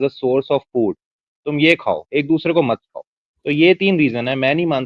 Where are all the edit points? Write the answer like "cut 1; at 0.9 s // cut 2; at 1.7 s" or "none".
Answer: none